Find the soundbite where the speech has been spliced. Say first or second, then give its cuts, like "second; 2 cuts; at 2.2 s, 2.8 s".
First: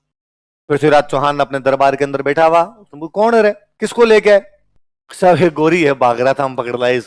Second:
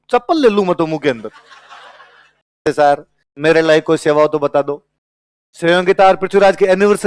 second; 1 cut; at 2.6 s